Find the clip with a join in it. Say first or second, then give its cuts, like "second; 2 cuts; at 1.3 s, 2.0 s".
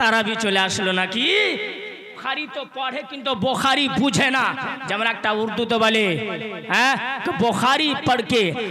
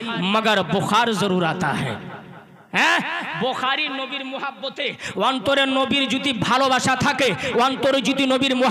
first; 1 cut; at 2.2 s